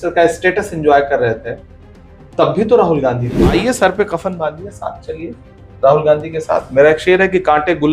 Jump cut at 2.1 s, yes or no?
no